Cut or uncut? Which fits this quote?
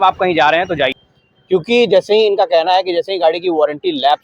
cut